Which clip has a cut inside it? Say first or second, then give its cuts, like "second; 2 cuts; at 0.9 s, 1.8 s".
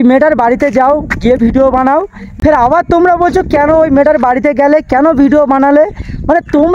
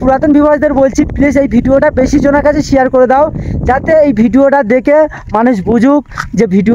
first; 1 cut; at 2.2 s